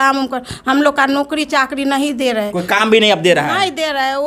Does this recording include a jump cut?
no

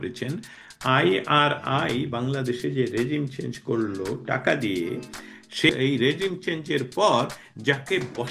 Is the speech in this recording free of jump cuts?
no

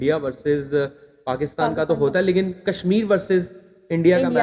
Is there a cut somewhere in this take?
no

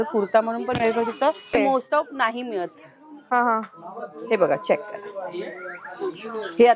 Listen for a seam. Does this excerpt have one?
yes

